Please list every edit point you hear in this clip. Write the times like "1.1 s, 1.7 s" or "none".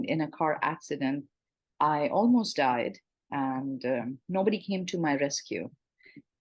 none